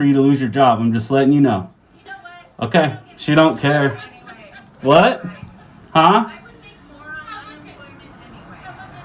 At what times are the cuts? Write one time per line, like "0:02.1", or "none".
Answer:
none